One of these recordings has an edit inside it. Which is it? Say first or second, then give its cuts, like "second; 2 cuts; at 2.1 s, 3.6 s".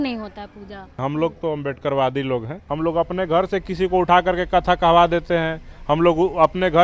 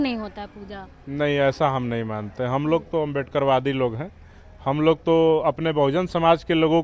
first; 2 cuts; at 1.0 s, 2.6 s